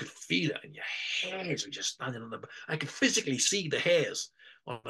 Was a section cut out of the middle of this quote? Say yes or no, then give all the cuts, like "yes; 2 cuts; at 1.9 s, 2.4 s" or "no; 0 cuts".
no; 0 cuts